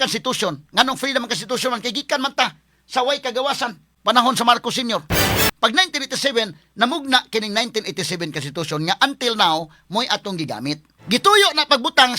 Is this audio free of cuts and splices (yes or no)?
no